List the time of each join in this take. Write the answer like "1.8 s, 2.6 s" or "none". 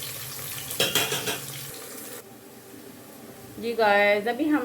1.7 s